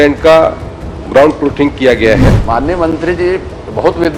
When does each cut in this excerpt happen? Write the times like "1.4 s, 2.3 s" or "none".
2.3 s